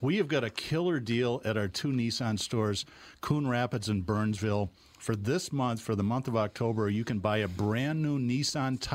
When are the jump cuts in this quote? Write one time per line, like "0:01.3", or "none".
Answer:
none